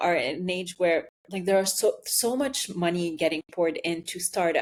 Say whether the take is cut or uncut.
uncut